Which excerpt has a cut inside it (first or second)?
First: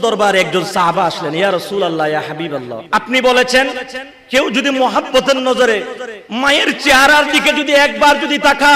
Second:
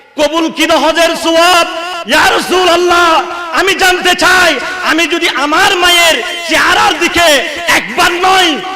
first